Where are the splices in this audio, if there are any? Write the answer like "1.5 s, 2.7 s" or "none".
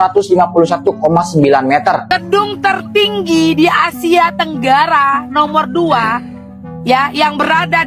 2.1 s